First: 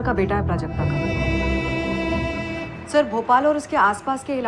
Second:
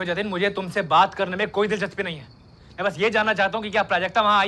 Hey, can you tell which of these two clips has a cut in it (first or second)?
first